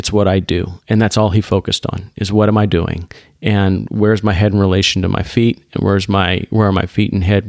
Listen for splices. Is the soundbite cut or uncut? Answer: uncut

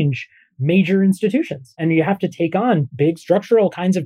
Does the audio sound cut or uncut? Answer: cut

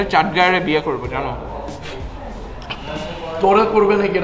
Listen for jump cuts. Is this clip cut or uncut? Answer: uncut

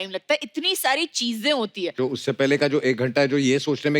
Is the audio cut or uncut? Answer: cut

